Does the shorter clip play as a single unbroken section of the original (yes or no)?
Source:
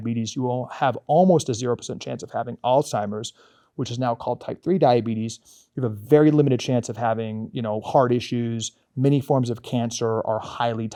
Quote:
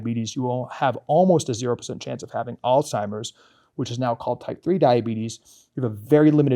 yes